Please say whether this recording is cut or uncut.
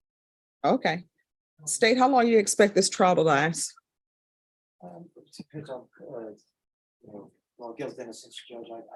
uncut